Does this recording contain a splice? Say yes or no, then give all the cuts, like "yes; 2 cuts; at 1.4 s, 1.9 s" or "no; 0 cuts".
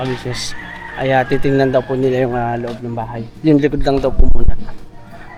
no; 0 cuts